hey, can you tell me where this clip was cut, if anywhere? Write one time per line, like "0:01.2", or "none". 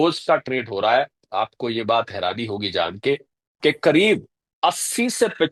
none

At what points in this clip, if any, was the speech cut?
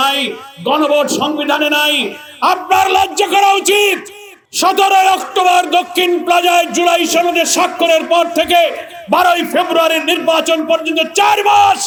none

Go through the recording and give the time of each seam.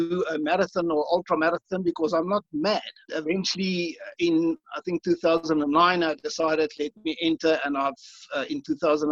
0:03.1

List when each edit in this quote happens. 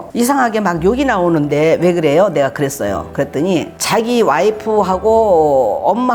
none

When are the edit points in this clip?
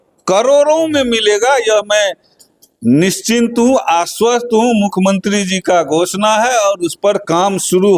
none

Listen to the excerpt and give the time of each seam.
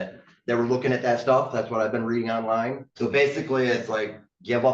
0:02.9

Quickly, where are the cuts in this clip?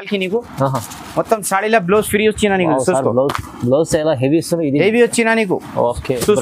none

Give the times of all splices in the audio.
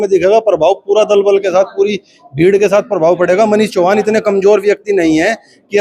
none

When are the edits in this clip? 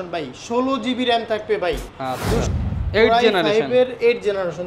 0:02.4

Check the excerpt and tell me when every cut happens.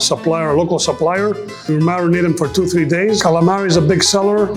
0:01.7
0:03.2

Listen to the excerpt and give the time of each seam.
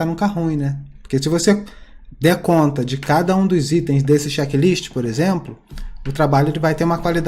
none

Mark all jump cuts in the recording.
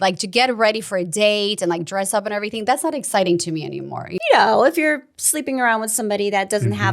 0:04.1

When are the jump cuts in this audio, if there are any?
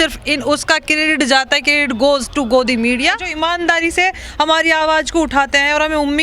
0:03.3

